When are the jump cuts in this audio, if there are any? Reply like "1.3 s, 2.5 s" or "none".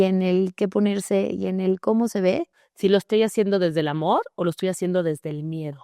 2.6 s